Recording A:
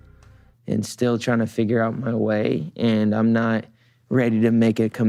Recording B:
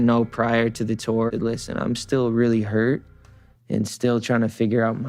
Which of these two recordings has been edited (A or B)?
B